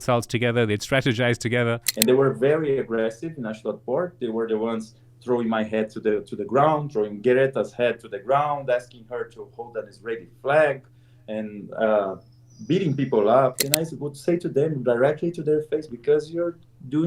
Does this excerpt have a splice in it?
yes; 2 cuts; at 1.9 s, 13.6 s

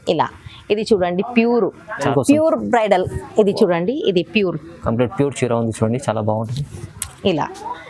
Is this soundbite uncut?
no; 1 cut; at 2.1 s

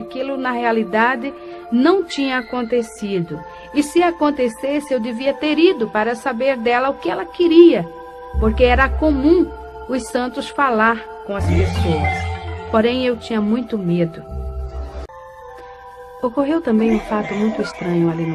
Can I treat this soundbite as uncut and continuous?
yes; 0 cuts

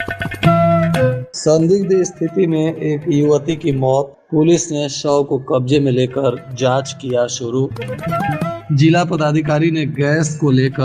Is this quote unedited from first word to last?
no; 1 cut; at 1.3 s

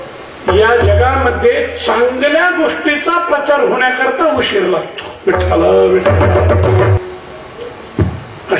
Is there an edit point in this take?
yes; 1 cut; at 7.0 s

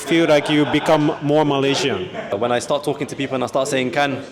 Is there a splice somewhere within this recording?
yes; 1 cut; at 2.3 s

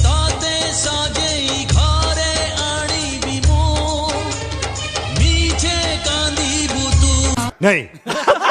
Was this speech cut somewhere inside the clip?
no; 0 cuts

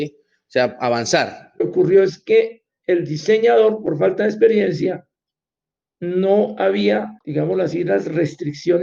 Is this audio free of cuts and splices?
no; 2 cuts; at 1.6 s, 7.2 s

